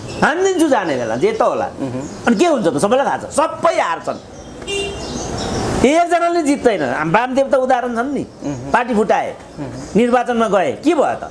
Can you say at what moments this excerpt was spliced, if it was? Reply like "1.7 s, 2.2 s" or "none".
none